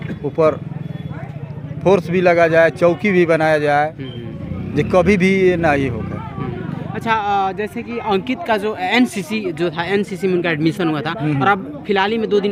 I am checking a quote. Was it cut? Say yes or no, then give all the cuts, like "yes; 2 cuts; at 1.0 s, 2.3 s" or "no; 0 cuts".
no; 0 cuts